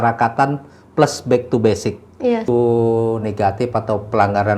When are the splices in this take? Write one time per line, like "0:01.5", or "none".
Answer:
0:02.4